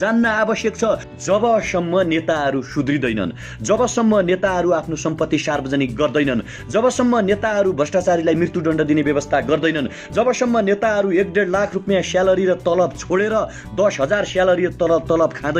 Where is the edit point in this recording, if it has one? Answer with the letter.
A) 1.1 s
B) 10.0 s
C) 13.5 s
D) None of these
A